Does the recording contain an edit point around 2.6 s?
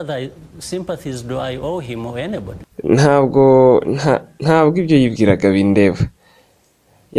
yes; 1 cut; at 2.6 s

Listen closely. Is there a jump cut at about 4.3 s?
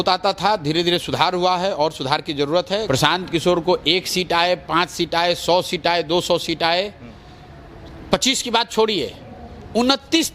no; 1 cut; at 2.8 s

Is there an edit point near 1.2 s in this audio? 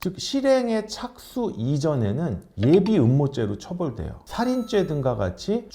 no; 1 cut; at 4.2 s

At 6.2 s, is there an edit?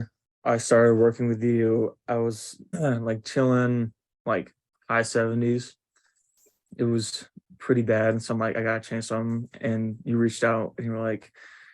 no; 1 cut; at 2.8 s

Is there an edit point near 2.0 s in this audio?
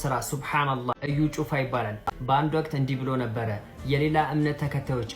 yes; 2 cuts; at 0.9 s, 2.0 s

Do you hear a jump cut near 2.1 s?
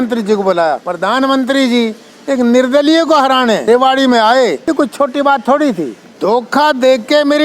no; 4 cuts; at 0.9 s, 3.6 s, 4.6 s, 6.0 s

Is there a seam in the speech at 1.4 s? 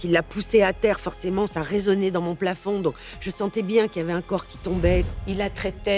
no; 1 cut; at 5.1 s

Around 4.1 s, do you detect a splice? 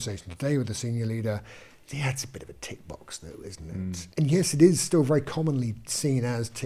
yes; 1 cut; at 4.1 s

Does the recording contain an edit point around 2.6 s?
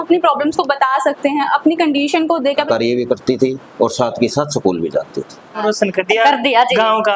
yes; 2 cuts; at 2.6 s, 5.6 s

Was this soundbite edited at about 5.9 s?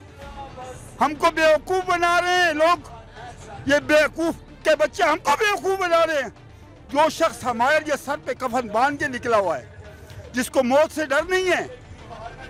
no; 0 cuts

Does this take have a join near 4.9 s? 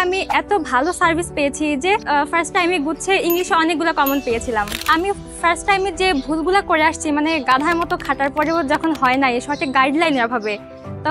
yes; 2 cuts; at 2.0 s, 4.9 s

